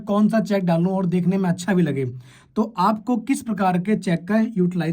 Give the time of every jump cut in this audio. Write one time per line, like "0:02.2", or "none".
none

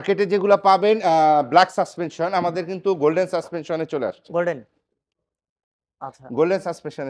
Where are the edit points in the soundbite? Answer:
none

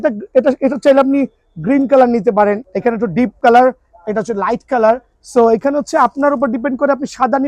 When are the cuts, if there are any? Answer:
0:02.9

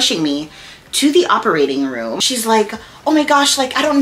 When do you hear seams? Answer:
0:02.1

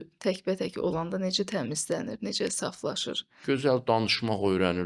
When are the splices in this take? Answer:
0:03.3

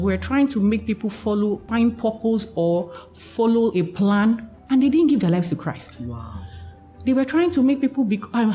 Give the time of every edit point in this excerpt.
0:01.6

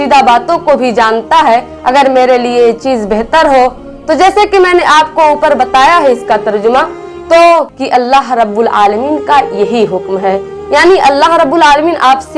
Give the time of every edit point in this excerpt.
0:07.8

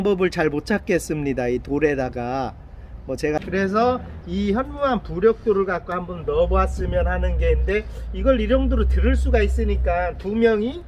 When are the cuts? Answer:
0:03.4

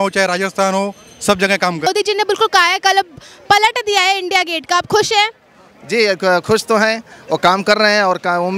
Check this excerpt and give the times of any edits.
0:01.9

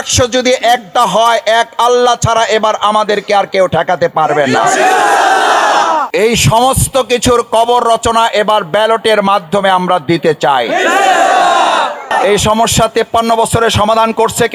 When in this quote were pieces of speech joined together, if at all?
0:06.1
0:12.1

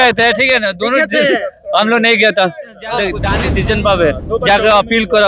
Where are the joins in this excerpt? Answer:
0:03.3

